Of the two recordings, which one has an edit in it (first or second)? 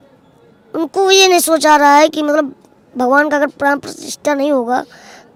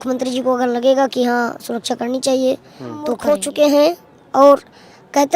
second